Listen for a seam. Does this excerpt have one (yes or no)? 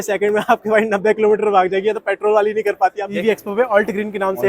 yes